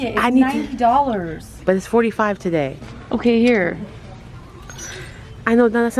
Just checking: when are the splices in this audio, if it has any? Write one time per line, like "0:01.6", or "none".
0:02.8